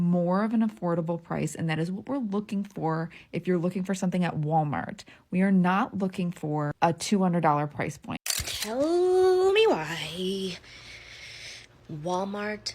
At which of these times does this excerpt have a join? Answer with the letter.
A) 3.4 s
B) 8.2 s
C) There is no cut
B